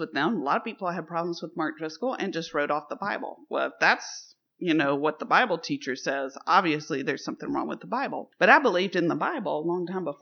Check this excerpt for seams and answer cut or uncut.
uncut